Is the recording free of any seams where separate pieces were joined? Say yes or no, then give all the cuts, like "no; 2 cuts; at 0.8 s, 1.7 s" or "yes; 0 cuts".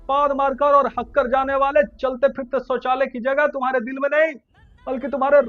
yes; 0 cuts